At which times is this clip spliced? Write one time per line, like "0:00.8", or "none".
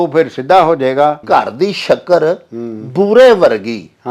0:01.2